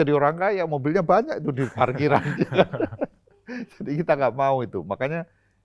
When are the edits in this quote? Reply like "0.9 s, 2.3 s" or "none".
none